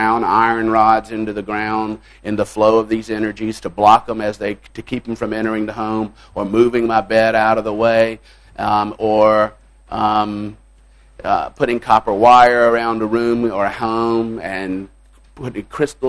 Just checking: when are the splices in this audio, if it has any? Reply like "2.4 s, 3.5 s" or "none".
none